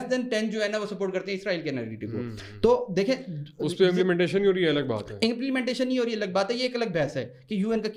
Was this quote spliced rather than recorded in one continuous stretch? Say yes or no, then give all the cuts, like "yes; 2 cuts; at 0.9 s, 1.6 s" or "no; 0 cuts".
no; 0 cuts